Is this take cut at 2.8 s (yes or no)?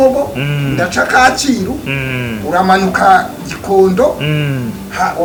no